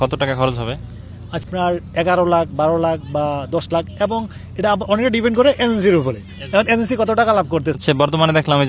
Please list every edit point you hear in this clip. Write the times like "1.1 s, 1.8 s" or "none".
1.4 s, 7.8 s

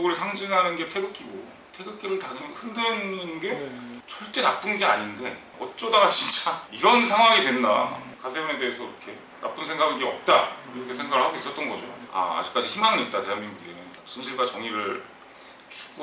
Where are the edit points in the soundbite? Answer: 5.5 s, 8.1 s, 12.0 s

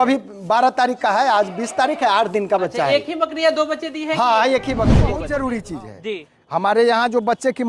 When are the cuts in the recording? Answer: 5.2 s

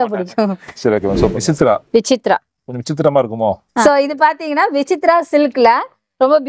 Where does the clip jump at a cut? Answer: 1.4 s, 3.8 s

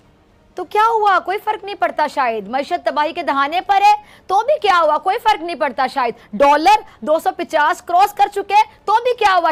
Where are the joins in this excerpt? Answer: none

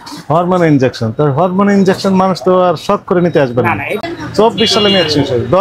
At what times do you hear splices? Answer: 4.0 s

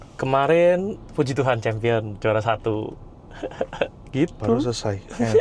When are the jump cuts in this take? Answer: none

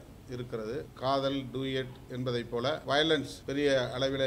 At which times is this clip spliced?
0.9 s, 2.8 s, 3.4 s

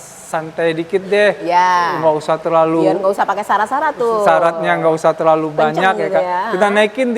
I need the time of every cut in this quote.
none

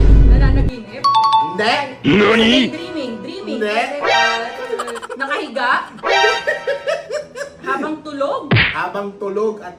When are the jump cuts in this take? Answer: none

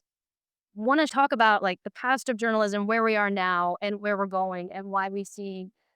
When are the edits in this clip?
1.1 s

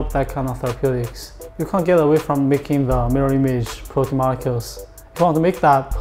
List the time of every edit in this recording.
1.4 s

